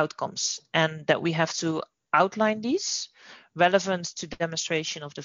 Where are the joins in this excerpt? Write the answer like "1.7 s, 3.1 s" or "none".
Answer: none